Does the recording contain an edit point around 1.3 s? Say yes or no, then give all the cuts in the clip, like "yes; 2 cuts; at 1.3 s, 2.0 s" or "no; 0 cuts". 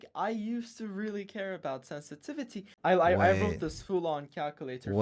no; 1 cut; at 2.6 s